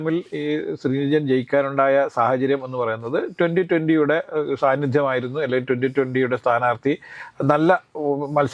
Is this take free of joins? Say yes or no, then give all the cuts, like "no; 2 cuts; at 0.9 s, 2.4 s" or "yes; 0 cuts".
yes; 0 cuts